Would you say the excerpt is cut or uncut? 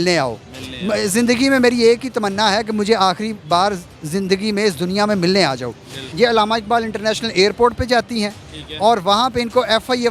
cut